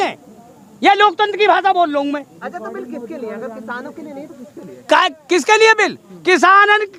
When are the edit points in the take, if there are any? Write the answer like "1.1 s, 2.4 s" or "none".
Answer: none

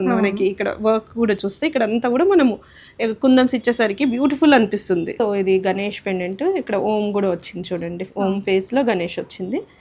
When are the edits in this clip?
5.1 s

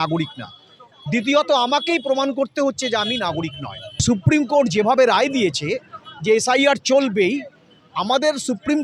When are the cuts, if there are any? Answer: 4.0 s

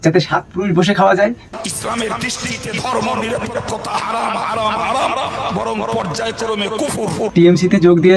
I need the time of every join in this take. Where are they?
1.4 s, 7.2 s

